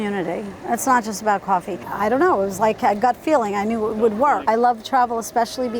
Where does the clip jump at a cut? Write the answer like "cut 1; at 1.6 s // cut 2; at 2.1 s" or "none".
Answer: cut 1; at 1.8 s // cut 2; at 4.4 s